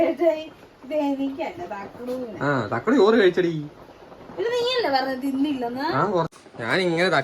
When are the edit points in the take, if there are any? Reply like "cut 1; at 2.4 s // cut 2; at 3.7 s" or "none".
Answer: cut 1; at 6.3 s